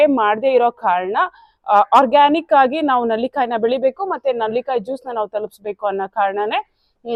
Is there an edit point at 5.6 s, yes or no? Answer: no